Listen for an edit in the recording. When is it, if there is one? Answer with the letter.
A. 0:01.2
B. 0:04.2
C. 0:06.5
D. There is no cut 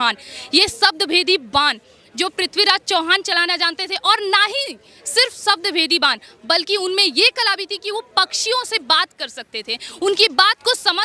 D